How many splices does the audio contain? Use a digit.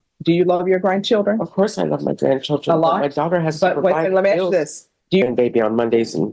1